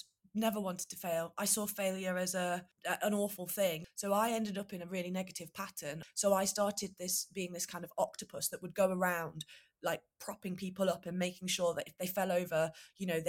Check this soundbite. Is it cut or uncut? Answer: cut